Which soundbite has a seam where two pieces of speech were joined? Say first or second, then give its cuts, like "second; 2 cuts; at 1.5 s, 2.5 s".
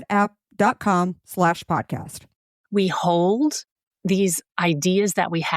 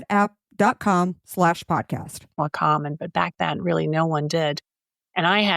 first; 1 cut; at 2.3 s